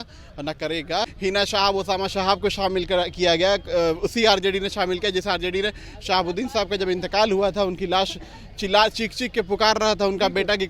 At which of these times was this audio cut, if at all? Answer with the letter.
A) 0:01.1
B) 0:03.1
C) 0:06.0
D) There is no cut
A